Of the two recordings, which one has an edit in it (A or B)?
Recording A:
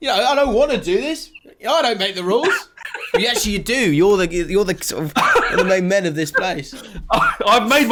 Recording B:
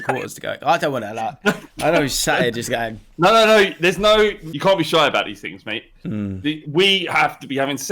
B